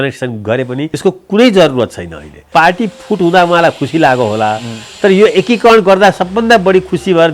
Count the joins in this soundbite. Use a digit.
2